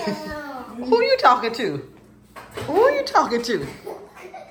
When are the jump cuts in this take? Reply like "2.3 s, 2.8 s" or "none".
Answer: none